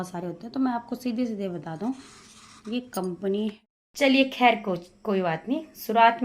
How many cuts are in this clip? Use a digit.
1